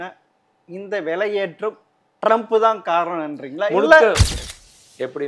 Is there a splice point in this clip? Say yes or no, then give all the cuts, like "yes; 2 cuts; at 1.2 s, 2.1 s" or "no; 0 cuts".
yes; 1 cut; at 4.3 s